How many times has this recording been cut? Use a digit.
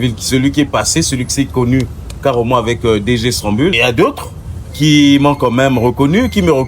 1